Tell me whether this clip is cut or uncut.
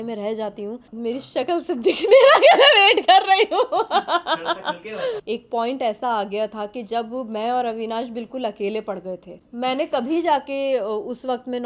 cut